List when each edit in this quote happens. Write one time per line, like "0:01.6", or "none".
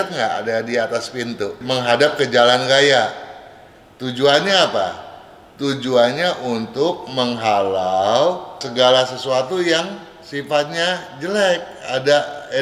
0:01.6
0:08.6